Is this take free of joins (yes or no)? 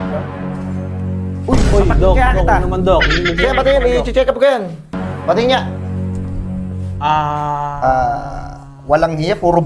no